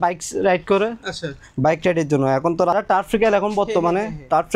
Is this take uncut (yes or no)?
no